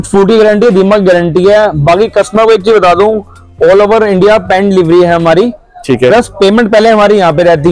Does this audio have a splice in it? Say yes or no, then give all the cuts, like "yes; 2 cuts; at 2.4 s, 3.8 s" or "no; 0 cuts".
no; 0 cuts